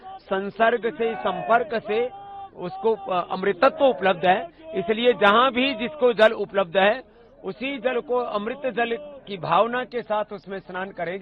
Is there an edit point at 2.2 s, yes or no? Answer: no